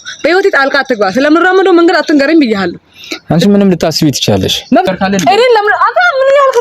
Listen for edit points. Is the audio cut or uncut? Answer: cut